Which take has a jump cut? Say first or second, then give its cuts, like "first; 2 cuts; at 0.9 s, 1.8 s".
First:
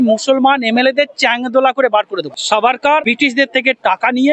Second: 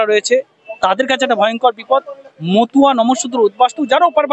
first; 2 cuts; at 2.3 s, 3.0 s